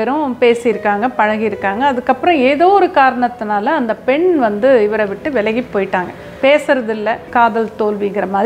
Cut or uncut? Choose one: cut